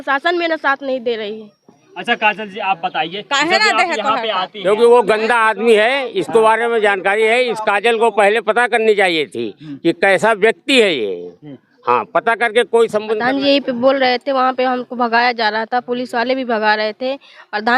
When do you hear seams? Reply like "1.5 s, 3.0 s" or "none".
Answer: 4.7 s, 13.2 s